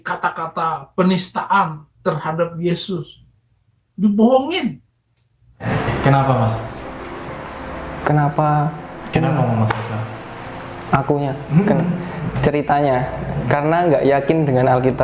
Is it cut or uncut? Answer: cut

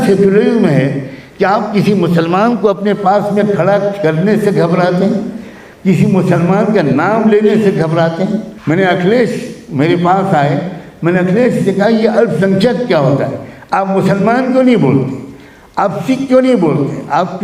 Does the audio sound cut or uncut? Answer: cut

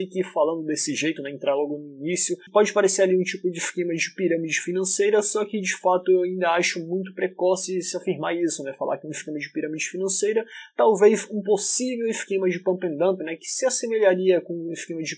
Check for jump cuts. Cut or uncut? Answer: uncut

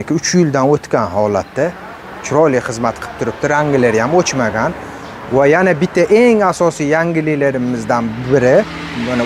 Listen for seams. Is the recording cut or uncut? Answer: uncut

